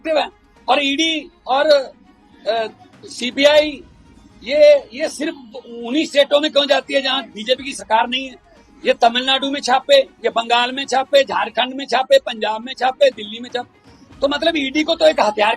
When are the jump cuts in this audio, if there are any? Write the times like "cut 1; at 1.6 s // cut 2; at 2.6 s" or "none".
none